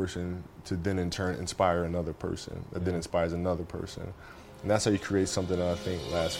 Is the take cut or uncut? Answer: uncut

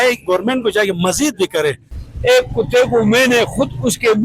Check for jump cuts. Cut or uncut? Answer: cut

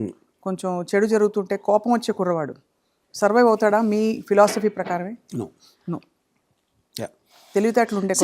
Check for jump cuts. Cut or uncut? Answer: uncut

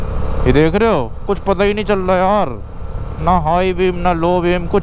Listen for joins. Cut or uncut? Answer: uncut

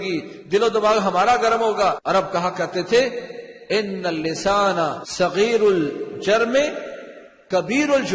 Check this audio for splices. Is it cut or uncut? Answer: cut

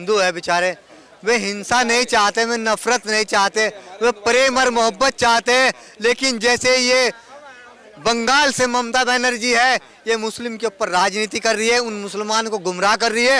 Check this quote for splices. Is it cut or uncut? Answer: uncut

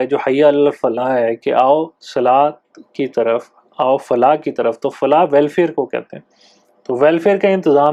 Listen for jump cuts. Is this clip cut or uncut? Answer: uncut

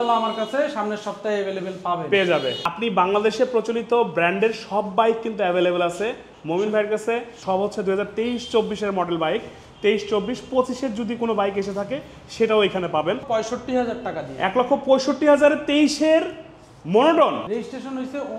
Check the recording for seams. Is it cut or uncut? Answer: cut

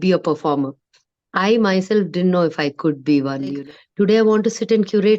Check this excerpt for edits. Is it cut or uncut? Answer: cut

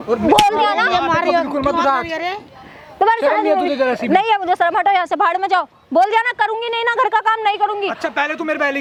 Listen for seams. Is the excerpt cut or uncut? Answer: uncut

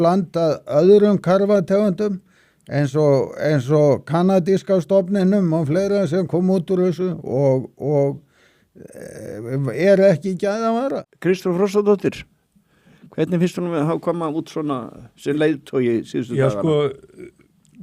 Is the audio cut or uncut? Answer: cut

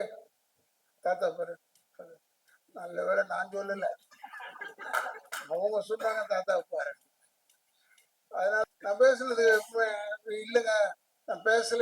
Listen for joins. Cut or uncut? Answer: cut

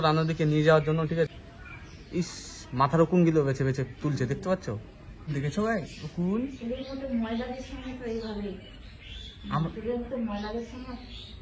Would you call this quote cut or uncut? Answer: cut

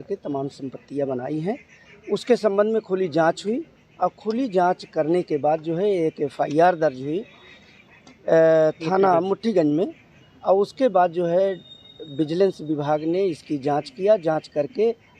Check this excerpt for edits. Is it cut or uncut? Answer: uncut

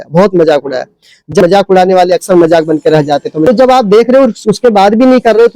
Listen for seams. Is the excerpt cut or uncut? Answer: cut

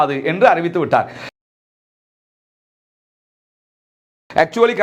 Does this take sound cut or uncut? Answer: uncut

